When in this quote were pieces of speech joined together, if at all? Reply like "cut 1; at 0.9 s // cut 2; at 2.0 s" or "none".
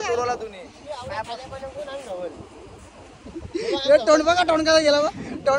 none